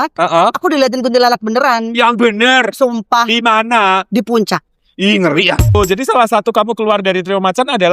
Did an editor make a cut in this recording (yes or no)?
yes